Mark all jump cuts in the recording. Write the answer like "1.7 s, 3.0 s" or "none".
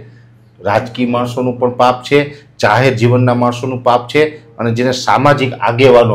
none